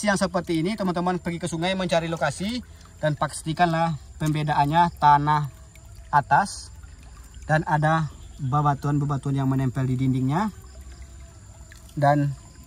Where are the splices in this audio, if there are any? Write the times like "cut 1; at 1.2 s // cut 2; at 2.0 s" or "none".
none